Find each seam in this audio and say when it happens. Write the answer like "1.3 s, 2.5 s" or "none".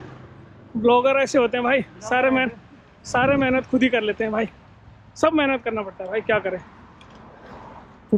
none